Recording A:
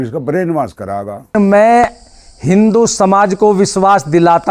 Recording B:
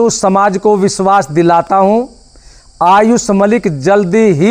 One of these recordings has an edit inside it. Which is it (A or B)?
A